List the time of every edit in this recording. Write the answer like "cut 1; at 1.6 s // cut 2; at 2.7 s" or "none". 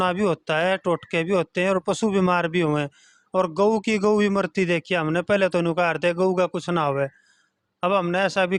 none

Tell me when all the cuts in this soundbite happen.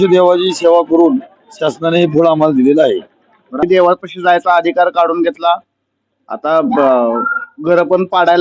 cut 1; at 3.6 s

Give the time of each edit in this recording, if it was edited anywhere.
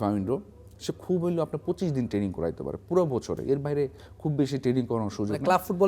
none

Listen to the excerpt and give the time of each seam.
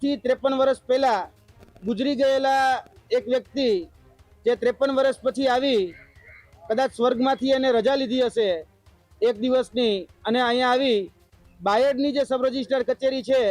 none

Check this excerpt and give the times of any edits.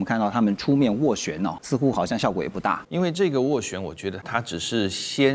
cut 1; at 1.6 s // cut 2; at 2.8 s // cut 3; at 4.2 s

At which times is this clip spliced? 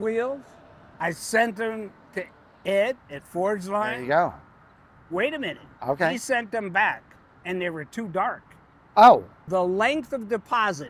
none

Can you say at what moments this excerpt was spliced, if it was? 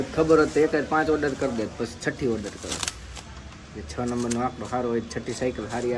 none

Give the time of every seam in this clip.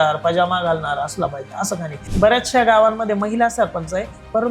cut 1; at 2.0 s

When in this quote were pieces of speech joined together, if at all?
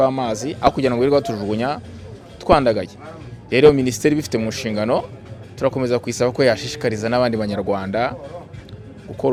none

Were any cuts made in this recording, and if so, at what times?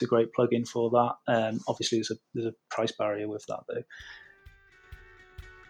cut 1; at 4.6 s

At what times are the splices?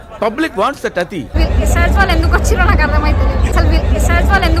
cut 1; at 1.3 s // cut 2; at 3.5 s

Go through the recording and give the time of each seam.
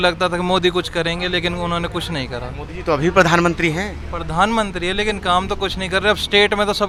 none

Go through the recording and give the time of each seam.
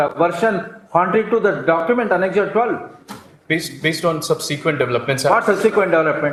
none

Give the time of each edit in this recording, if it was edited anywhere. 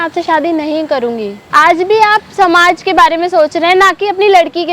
cut 1; at 1.4 s

